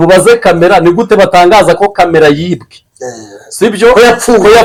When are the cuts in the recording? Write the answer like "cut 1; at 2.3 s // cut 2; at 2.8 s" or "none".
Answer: none